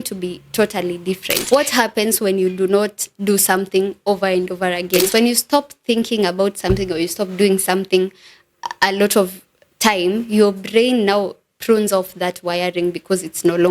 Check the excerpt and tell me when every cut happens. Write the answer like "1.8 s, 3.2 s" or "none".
1.4 s, 5.1 s